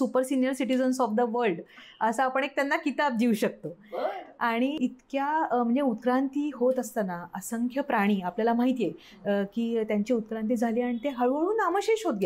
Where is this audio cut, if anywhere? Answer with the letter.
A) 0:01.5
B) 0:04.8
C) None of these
B